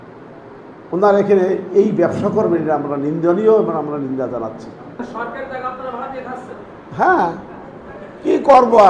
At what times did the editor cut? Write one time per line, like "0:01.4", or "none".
0:05.0